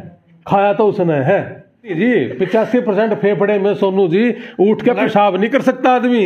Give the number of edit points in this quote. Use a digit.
1